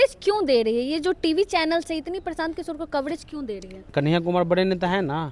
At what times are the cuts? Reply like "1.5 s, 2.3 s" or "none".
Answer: 3.9 s

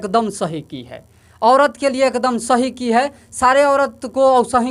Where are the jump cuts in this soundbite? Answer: none

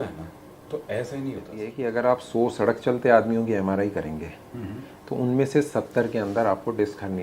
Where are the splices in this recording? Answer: 1.7 s

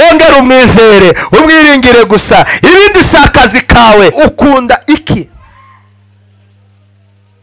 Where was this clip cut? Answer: 4.1 s

